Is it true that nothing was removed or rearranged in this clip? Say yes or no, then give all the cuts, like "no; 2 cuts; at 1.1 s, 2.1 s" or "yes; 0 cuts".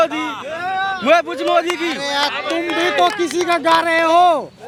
yes; 0 cuts